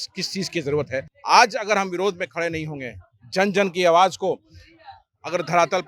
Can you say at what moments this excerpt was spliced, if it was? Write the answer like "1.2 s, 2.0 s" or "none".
1.1 s